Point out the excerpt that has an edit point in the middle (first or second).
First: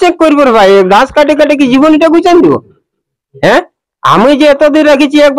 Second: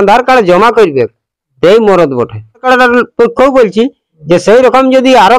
second